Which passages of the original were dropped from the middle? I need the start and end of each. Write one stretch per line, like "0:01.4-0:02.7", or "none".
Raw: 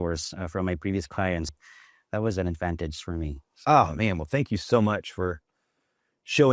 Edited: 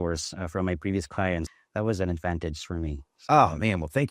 0:01.6-0:02.0